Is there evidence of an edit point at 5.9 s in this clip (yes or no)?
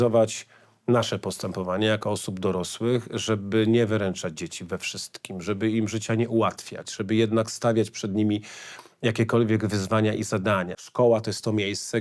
no